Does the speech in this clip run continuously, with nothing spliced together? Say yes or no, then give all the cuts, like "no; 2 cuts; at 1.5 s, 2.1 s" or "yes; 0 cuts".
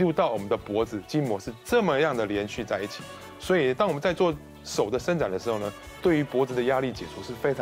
yes; 0 cuts